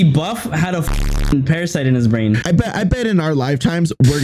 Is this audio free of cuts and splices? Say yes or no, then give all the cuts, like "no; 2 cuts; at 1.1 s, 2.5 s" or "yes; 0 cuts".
no; 1 cut; at 2.4 s